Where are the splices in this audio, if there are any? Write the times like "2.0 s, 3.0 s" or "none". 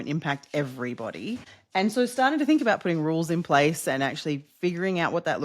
1.5 s